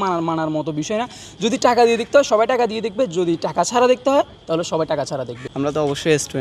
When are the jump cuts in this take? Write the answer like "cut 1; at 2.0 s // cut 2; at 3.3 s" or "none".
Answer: none